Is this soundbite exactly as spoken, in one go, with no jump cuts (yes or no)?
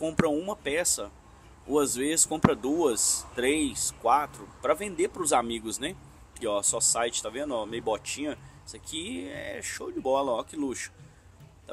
no